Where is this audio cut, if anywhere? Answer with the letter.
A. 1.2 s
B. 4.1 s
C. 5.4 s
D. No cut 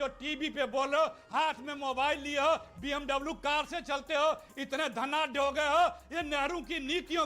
A